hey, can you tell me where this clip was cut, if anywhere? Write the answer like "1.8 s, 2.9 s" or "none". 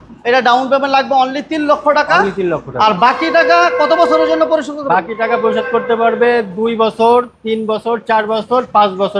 none

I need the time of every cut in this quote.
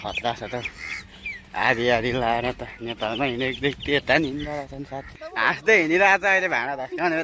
5.2 s

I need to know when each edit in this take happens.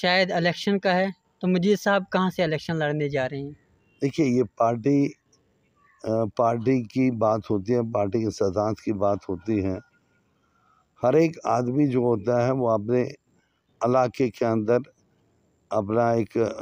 none

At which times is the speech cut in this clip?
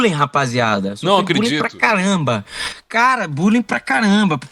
none

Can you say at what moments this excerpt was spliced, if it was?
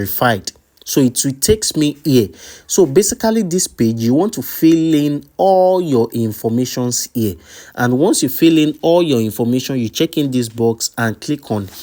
none

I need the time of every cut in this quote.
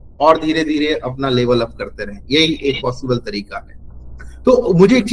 none

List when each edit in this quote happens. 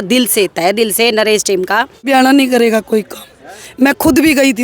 2.0 s

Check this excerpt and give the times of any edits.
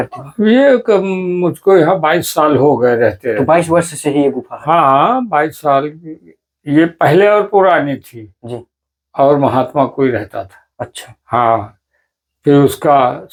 none

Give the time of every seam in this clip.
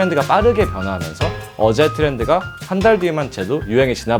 none

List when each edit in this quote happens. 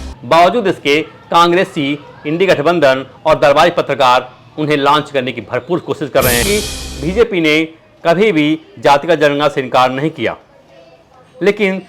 6.4 s

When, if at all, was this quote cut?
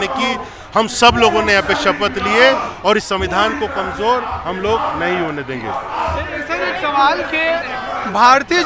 none

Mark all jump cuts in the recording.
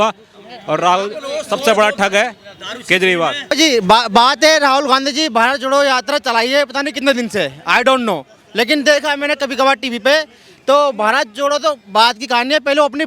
3.4 s

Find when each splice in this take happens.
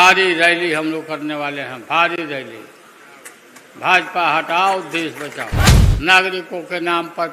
5.7 s

